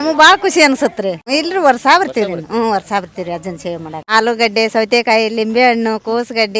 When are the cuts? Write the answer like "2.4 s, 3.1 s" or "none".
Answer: 1.2 s, 4.0 s